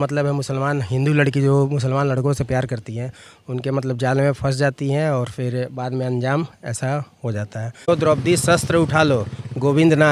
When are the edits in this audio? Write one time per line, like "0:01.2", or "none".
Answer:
0:07.9

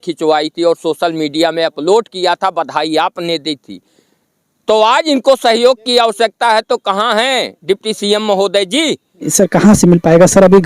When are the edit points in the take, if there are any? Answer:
0:09.2

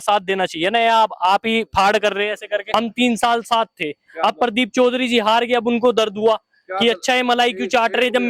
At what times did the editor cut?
0:02.7

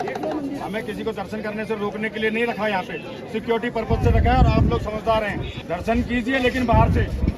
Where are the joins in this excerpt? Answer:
0:05.5

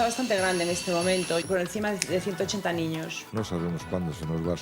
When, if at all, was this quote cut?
0:03.2

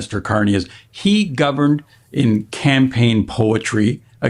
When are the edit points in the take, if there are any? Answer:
none

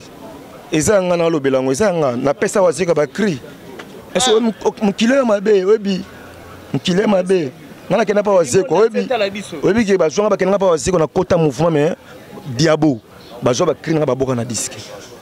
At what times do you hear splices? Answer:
none

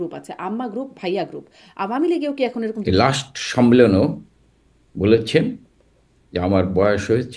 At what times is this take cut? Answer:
0:02.8

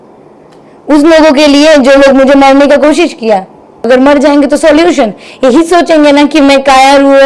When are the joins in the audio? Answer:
0:03.9

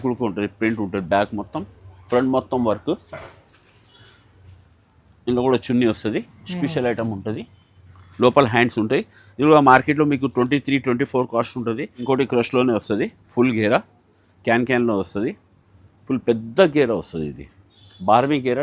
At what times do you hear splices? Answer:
0:12.0

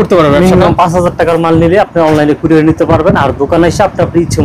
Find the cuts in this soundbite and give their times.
none

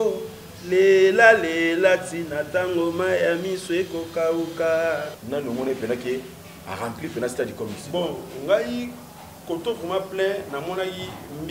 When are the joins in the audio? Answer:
0:05.1

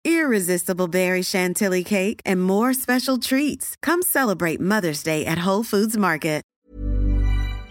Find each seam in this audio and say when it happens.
0:06.5

